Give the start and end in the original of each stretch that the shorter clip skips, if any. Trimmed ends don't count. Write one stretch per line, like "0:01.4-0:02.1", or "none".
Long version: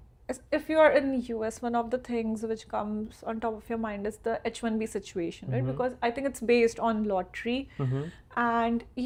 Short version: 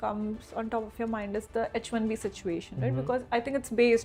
none